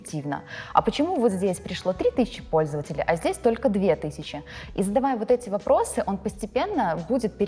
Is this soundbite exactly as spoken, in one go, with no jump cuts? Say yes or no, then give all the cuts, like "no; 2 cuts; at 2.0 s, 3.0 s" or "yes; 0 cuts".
yes; 0 cuts